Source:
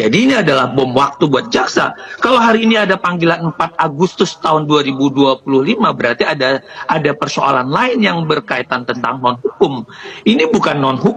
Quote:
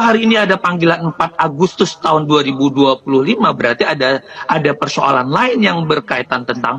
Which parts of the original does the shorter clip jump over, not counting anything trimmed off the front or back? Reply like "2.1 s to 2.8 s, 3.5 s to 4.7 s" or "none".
none